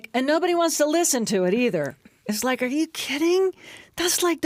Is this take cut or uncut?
uncut